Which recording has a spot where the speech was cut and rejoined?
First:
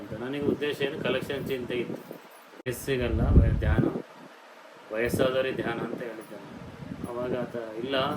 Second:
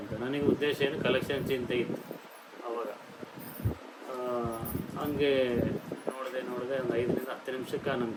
first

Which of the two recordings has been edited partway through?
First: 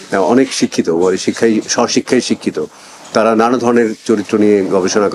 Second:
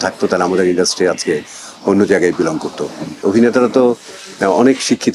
second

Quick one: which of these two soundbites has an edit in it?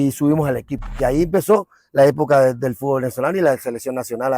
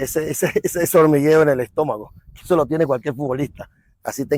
first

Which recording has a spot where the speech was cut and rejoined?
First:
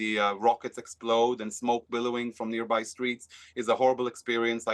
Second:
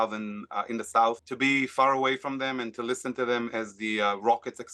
second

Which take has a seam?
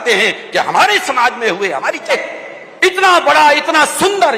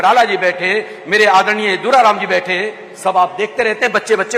first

